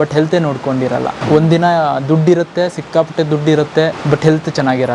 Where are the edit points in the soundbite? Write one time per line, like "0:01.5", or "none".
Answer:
0:01.2
0:04.0